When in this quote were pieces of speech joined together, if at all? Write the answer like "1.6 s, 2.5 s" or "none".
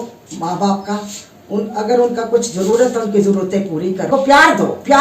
4.1 s